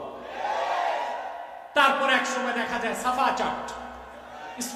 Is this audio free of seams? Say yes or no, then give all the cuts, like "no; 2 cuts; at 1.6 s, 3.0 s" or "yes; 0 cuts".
yes; 0 cuts